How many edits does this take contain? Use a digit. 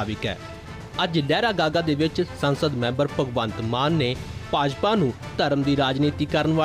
1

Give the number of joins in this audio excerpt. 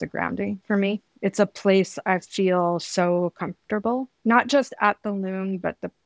2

